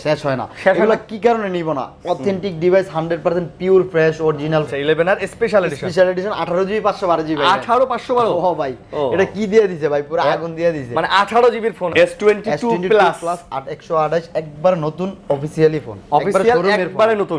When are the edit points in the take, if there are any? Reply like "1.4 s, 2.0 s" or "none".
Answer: 4.7 s, 11.9 s